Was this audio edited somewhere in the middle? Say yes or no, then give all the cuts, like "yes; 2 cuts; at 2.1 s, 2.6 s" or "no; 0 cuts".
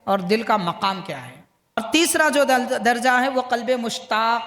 yes; 1 cut; at 1.8 s